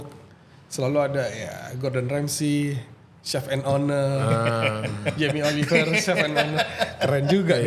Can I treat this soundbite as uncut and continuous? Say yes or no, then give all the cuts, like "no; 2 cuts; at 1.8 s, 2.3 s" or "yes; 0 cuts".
yes; 0 cuts